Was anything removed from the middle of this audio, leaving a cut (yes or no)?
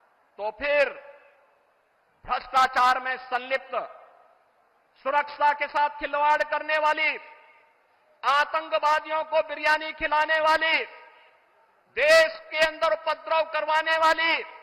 no